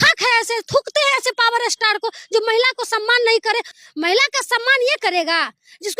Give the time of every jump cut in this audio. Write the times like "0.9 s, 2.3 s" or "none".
3.8 s